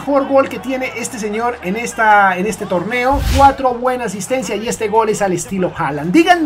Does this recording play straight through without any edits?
no; 1 cut; at 3.3 s

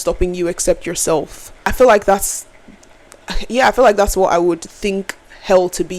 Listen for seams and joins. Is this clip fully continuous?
no; 1 cut; at 1.7 s

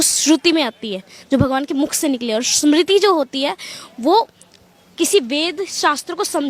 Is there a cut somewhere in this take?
no; 0 cuts

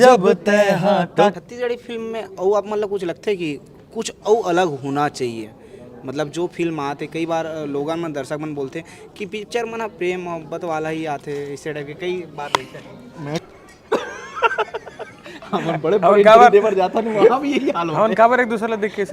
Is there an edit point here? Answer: yes; 2 cuts; at 1.3 s, 13.4 s

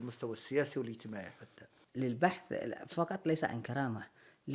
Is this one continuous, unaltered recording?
no; 1 cut; at 1.8 s

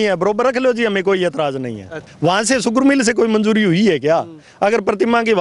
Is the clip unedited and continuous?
no; 1 cut; at 2.0 s

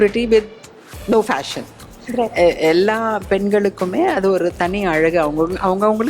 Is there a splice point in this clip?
no; 0 cuts

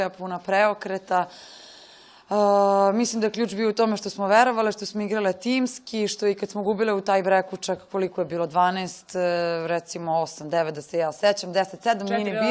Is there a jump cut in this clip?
no; 0 cuts

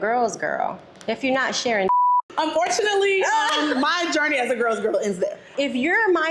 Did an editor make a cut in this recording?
yes; 2 cuts; at 2.3 s, 5.5 s

